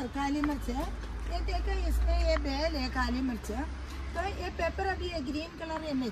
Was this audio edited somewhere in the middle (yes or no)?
no